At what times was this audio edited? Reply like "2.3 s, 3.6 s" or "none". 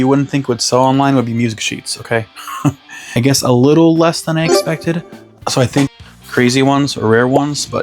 2.9 s, 5.9 s